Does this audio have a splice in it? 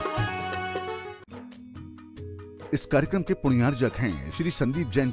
yes; 1 cut; at 1.2 s

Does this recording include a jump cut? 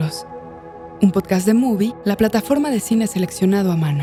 no; 0 cuts

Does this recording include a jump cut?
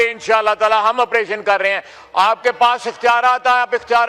no; 0 cuts

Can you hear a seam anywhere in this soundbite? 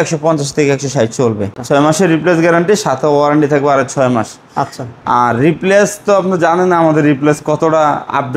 yes; 1 cut; at 1.6 s

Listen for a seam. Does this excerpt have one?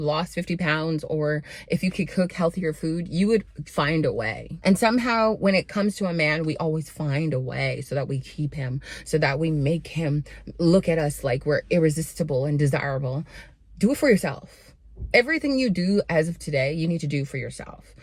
yes; 1 cut; at 4.5 s

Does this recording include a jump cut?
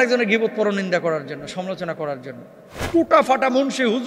yes; 1 cut; at 2.8 s

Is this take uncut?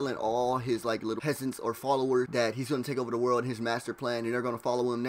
no; 2 cuts; at 1.2 s, 2.3 s

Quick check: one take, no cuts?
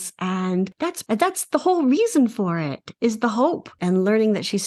no; 3 cuts; at 1.0 s, 2.8 s, 3.7 s

